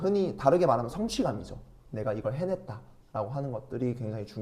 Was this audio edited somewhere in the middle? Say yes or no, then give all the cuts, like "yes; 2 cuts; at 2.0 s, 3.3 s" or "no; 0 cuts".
no; 0 cuts